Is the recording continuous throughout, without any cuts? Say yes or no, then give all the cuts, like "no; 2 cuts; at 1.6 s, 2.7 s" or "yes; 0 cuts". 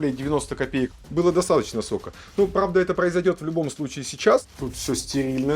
no; 2 cuts; at 1.0 s, 4.5 s